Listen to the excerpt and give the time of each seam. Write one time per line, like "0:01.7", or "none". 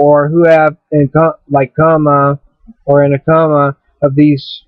0:01.1